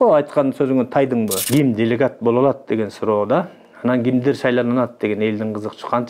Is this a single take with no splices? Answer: no; 1 cut; at 1.5 s

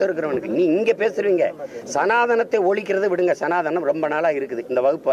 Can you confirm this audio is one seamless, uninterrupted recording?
yes; 0 cuts

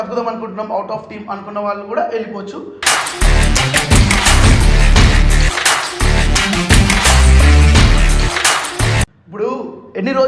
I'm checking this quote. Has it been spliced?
yes; 1 cut; at 9.1 s

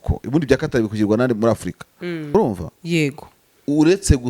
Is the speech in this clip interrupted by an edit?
yes; 1 cut; at 2.3 s

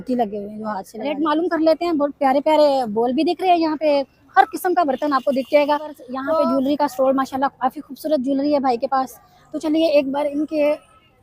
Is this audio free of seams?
no; 2 cuts; at 1.0 s, 6.1 s

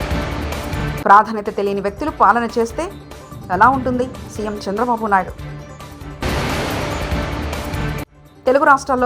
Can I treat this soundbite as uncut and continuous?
no; 1 cut; at 1.0 s

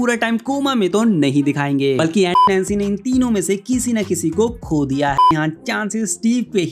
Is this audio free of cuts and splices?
no; 2 cuts; at 2.4 s, 5.3 s

